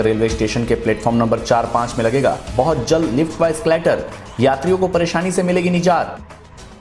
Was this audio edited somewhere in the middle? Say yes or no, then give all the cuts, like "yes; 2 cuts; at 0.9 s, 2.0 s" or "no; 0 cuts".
no; 0 cuts